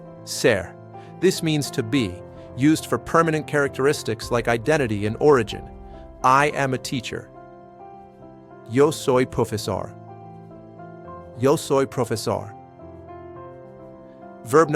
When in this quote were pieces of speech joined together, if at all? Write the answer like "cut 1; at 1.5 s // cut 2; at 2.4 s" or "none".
cut 1; at 7.2 s // cut 2; at 8.7 s // cut 3; at 9.9 s // cut 4; at 11.4 s